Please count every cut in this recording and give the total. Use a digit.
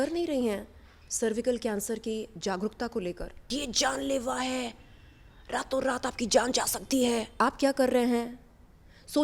2